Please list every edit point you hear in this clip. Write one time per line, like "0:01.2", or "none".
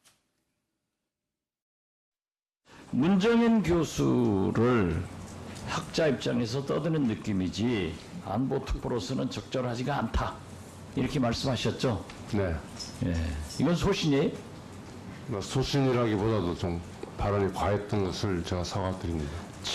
0:09.1